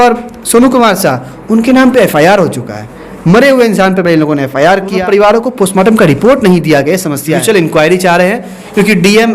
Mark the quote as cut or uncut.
cut